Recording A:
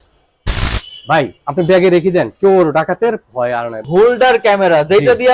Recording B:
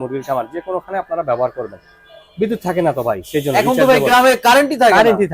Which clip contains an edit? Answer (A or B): A